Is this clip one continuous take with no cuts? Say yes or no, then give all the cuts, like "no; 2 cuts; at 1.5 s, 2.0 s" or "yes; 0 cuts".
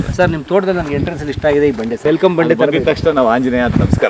no; 1 cut; at 2.0 s